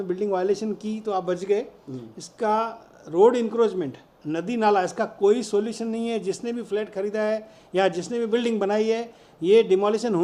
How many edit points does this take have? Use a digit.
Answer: 0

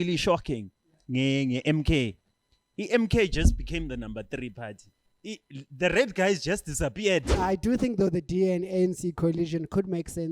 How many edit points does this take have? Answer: 1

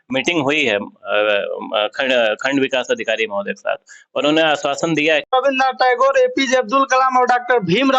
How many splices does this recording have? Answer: 1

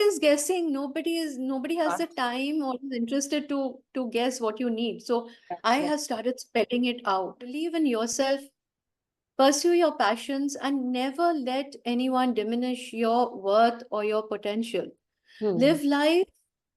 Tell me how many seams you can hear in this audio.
1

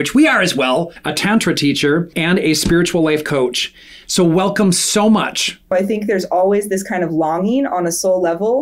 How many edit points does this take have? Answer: 3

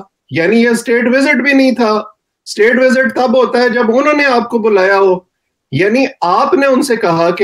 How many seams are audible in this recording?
0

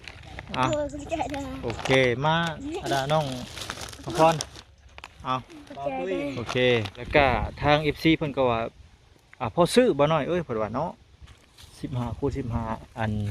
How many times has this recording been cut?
1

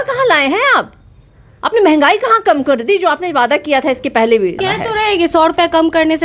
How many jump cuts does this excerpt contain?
1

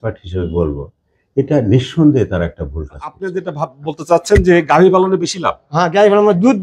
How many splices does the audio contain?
1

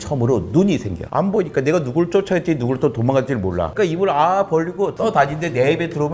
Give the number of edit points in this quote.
3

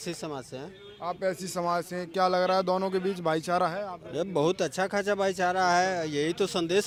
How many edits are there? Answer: 0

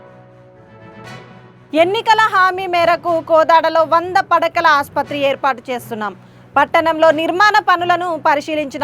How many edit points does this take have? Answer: 1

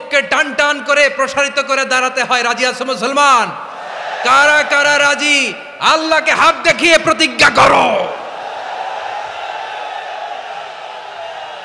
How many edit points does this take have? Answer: 0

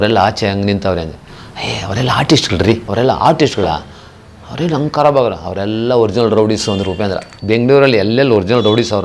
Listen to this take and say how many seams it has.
2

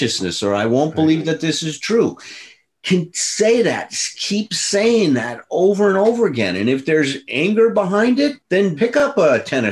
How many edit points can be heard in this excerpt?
1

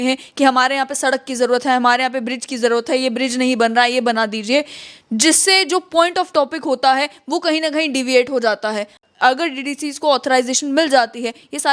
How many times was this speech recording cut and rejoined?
1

